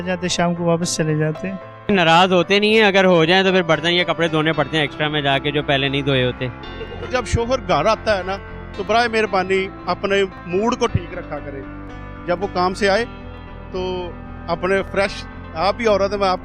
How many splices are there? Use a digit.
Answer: 2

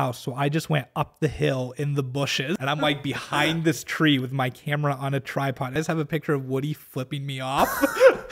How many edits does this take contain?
2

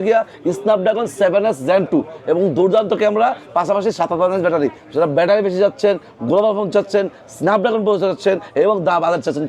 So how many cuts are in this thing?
0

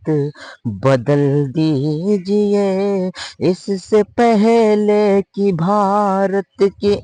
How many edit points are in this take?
0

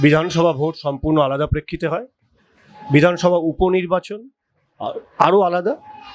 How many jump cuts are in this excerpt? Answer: 0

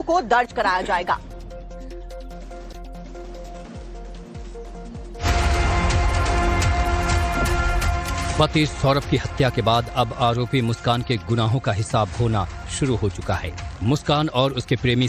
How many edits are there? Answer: 1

